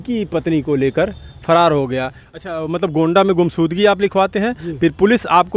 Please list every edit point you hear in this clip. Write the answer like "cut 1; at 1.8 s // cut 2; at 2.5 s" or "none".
cut 1; at 2.2 s